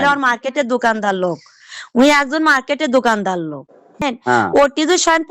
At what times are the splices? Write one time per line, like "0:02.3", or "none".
0:03.9